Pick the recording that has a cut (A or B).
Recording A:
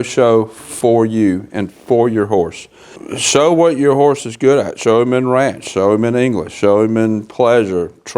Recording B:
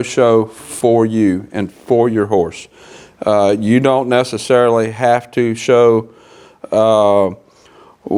A